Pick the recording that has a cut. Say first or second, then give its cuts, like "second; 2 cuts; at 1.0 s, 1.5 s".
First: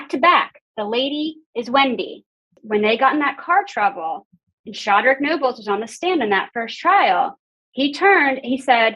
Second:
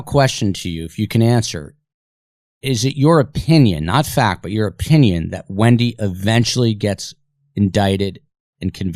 first; 1 cut; at 2.6 s